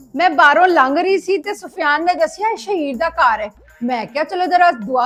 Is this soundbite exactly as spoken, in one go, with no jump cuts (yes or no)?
yes